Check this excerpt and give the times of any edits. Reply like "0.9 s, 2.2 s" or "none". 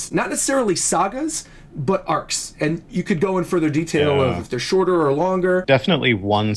5.6 s